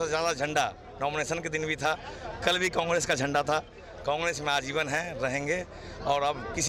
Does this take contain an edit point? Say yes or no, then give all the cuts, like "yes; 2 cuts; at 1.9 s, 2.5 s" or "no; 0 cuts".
no; 0 cuts